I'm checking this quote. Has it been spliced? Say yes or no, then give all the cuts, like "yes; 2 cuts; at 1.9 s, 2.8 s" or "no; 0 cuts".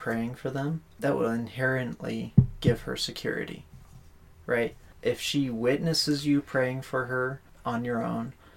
yes; 3 cuts; at 0.9 s, 4.9 s, 7.5 s